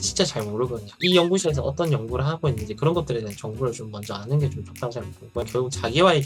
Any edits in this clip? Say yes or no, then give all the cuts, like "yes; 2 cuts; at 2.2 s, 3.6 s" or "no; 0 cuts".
yes; 2 cuts; at 0.9 s, 5.5 s